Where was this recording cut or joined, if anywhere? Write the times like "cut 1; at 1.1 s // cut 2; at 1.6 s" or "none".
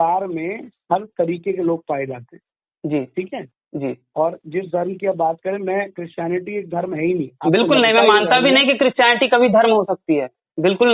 none